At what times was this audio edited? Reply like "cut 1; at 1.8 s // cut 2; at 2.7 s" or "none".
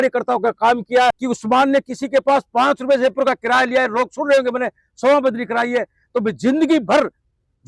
cut 1; at 1.2 s